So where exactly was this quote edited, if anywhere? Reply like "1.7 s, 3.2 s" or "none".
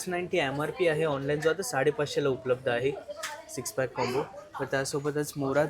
none